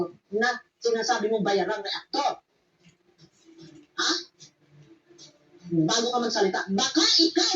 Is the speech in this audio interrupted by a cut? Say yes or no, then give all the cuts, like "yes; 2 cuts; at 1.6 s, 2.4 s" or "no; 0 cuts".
yes; 1 cut; at 1.0 s